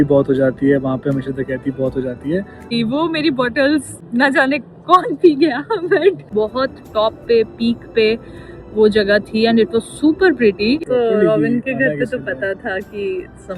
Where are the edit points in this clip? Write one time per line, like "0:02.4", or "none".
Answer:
0:02.7
0:04.0
0:06.3
0:10.8

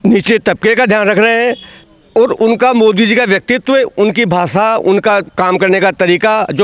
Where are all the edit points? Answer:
none

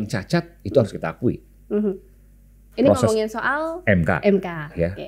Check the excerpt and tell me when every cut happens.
none

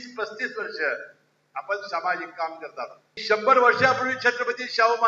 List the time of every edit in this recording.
0:03.1

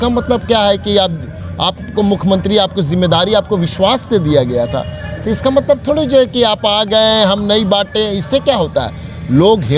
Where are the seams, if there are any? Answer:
none

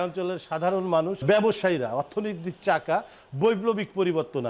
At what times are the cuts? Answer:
0:01.2

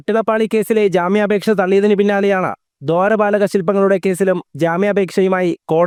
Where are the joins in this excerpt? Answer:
none

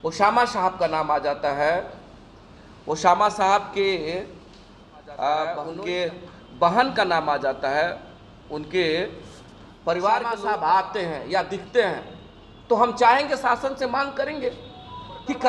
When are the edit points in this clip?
0:05.7
0:10.3

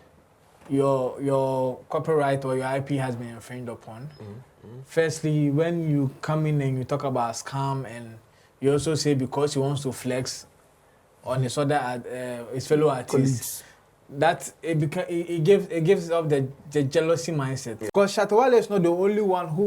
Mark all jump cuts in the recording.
0:17.9

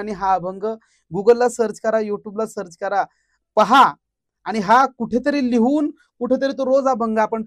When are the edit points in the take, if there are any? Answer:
none

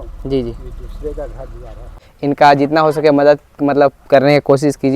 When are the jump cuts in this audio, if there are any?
0:01.9

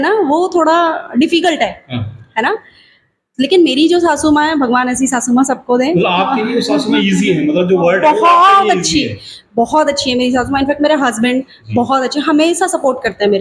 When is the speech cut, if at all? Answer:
none

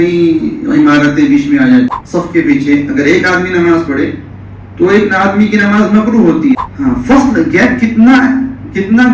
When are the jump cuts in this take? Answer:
0:01.9
0:06.6

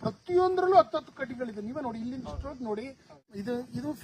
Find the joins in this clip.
0:03.1

